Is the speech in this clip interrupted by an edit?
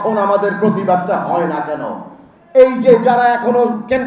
no; 0 cuts

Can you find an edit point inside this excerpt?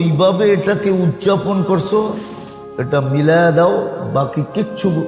no; 0 cuts

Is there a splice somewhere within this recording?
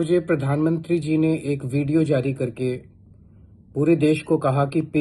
no; 0 cuts

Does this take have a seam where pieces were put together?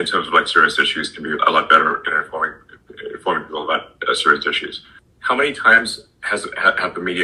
no; 0 cuts

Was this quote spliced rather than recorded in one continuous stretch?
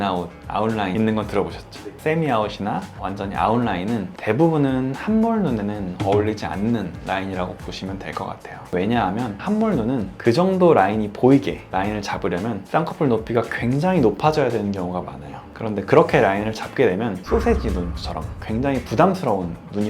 yes; 3 cuts; at 1.9 s, 9.3 s, 17.2 s

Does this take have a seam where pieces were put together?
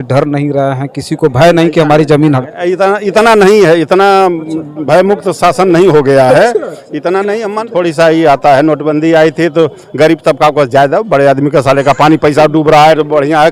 yes; 1 cut; at 7.6 s

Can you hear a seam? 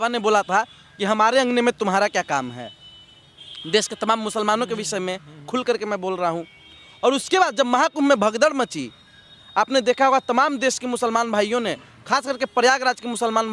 no; 0 cuts

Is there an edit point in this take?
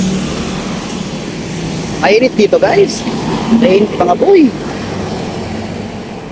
no; 0 cuts

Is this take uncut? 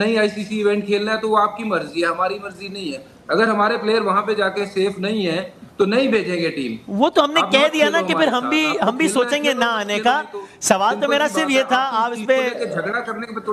yes; 0 cuts

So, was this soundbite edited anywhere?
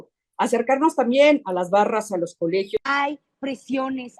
yes; 1 cut; at 2.8 s

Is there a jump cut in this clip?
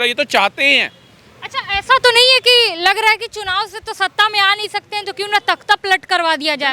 no; 0 cuts

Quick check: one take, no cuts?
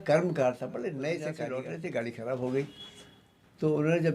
no; 1 cut; at 1.4 s

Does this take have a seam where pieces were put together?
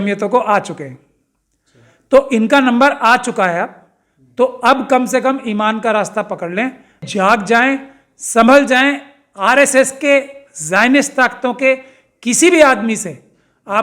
yes; 1 cut; at 7.1 s

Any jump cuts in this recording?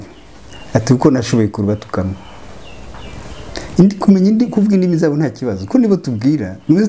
no; 0 cuts

